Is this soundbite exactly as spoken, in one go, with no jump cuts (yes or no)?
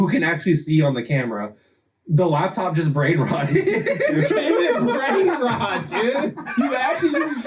no